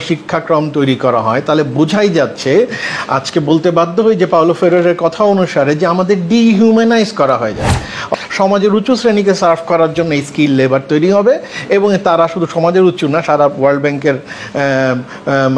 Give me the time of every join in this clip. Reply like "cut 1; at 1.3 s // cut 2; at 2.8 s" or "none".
cut 1; at 8.1 s